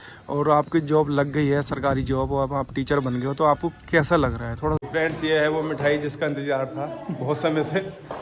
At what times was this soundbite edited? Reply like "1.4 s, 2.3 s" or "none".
4.8 s